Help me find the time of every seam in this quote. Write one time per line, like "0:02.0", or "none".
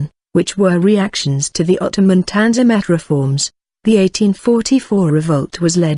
0:04.8